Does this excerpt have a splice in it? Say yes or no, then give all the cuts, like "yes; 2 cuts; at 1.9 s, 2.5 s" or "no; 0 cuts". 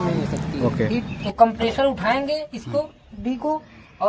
yes; 1 cut; at 1.2 s